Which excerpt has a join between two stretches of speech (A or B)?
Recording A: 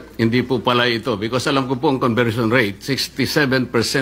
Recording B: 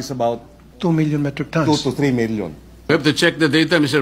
B